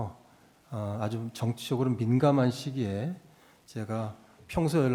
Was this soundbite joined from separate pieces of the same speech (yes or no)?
no